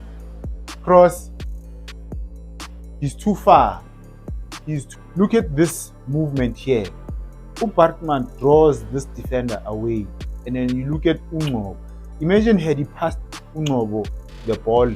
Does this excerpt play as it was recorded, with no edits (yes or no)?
no